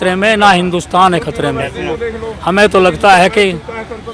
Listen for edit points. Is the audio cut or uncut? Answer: uncut